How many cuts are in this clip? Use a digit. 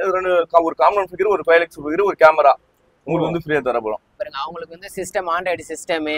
1